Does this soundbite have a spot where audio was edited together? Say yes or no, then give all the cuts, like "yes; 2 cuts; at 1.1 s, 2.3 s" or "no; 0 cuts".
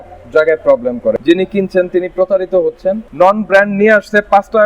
yes; 2 cuts; at 1.1 s, 3.1 s